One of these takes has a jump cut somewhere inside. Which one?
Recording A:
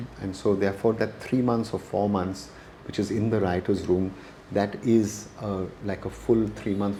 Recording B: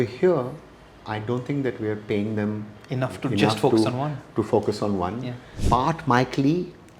B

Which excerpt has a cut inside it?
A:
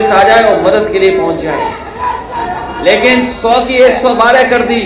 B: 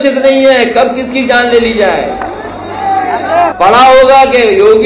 B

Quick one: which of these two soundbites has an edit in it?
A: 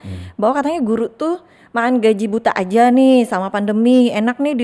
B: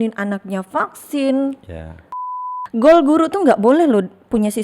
B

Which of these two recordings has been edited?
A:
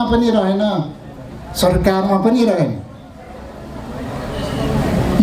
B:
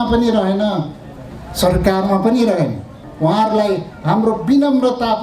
B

